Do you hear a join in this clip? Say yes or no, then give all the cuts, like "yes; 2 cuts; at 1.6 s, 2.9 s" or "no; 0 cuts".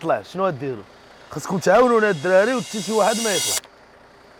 no; 0 cuts